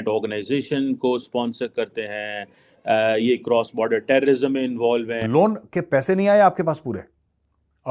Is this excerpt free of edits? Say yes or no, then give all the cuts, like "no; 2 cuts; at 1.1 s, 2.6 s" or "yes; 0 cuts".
no; 1 cut; at 5.2 s